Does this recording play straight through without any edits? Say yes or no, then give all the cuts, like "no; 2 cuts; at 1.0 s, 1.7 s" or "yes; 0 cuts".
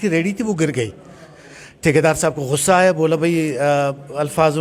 yes; 0 cuts